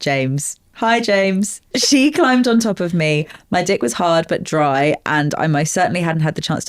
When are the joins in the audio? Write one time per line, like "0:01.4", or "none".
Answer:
0:01.7